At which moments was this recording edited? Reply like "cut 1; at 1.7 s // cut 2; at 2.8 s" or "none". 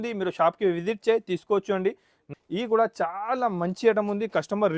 cut 1; at 2.2 s